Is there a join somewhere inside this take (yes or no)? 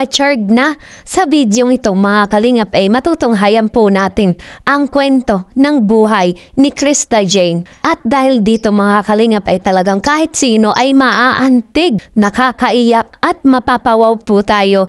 yes